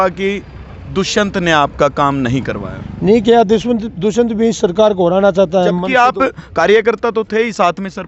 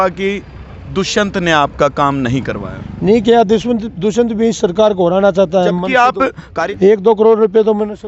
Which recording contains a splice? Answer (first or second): second